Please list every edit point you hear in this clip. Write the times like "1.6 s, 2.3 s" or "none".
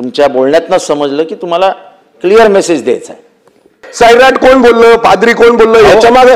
3.8 s